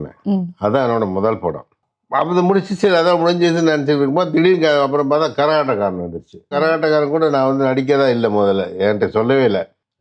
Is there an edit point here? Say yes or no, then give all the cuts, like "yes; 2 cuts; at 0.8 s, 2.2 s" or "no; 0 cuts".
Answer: yes; 1 cut; at 6.6 s